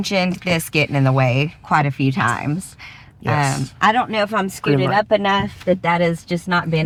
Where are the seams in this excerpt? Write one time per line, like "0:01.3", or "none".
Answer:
none